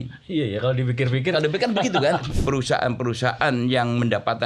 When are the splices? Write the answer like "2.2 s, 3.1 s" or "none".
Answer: 2.3 s